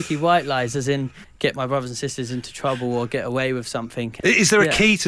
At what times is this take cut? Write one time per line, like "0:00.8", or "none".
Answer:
0:01.2
0:04.1